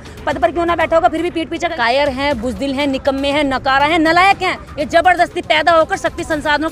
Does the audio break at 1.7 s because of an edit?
yes; 1 cut; at 1.7 s

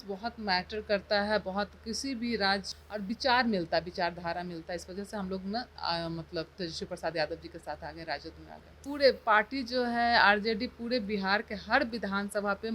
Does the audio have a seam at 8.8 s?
yes; 2 cuts; at 2.7 s, 8.8 s

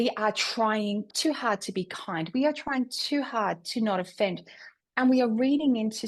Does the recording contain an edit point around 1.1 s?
yes; 1 cut; at 1.1 s

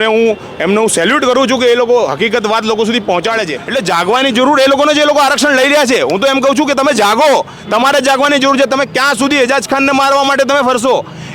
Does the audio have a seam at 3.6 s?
yes; 1 cut; at 3.6 s

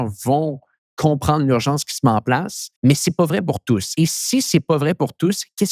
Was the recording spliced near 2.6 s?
yes; 2 cuts; at 2.6 s, 3.9 s

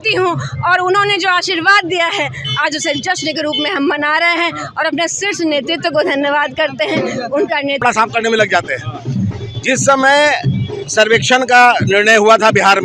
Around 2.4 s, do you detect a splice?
no; 1 cut; at 7.8 s

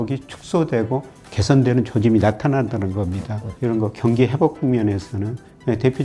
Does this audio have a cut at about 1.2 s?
no; 1 cut; at 3.4 s

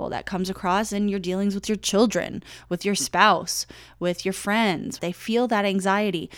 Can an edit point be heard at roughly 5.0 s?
yes; 1 cut; at 5.0 s

